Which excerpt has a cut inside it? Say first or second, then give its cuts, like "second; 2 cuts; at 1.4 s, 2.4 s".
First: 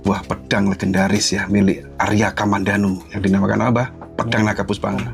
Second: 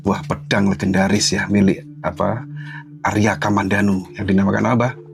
first; 1 cut; at 1.9 s